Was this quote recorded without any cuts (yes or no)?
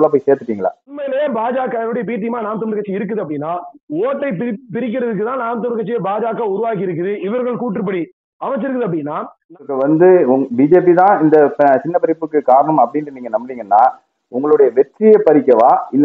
no